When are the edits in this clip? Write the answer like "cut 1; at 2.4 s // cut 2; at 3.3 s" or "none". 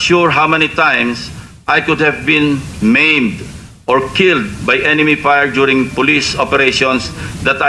none